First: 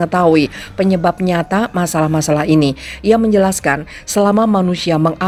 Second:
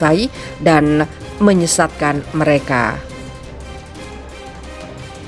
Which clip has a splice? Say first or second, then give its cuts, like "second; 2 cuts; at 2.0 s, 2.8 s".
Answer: second; 2 cuts; at 1.2 s, 3.0 s